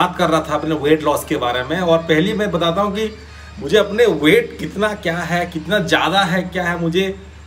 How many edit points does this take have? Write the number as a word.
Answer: zero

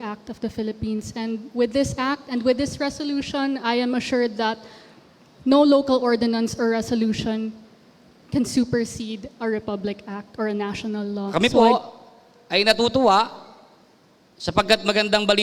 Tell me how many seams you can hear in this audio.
one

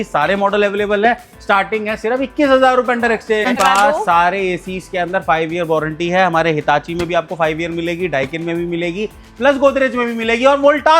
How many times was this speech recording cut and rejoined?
one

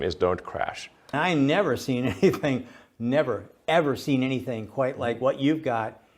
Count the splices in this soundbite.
one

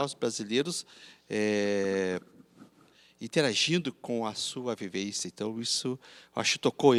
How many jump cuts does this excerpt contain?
zero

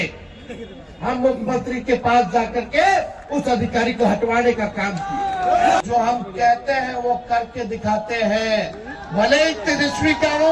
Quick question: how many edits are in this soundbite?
one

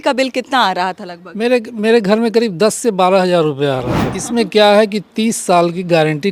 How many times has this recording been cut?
one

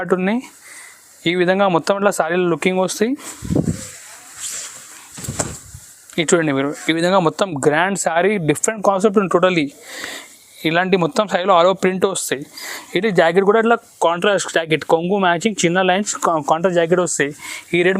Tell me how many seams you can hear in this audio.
zero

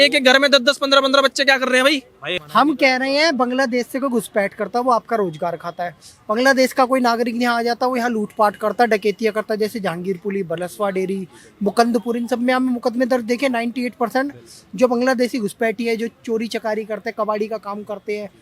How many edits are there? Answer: one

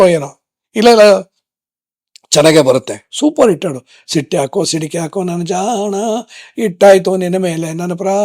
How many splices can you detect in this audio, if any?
one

